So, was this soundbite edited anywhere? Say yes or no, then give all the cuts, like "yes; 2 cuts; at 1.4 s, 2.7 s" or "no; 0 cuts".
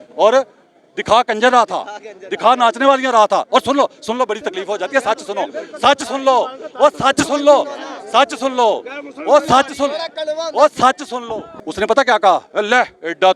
no; 0 cuts